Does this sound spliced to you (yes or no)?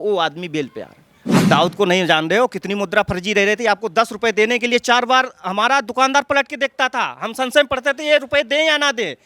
yes